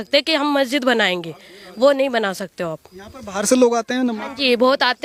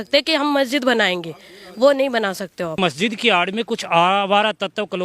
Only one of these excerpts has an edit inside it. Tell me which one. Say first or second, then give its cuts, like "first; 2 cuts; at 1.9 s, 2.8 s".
second; 1 cut; at 2.8 s